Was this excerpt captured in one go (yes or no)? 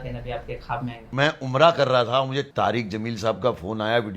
no